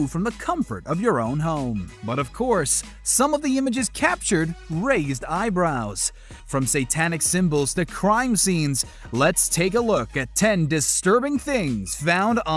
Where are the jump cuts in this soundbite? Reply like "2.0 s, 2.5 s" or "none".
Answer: 5.2 s